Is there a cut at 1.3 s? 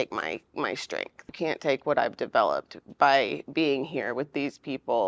yes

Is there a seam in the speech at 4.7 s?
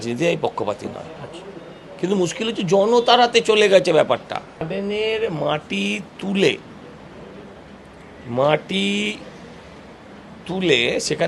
yes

